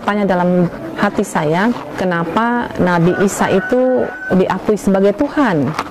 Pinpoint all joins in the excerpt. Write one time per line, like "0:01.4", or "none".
0:02.0
0:04.2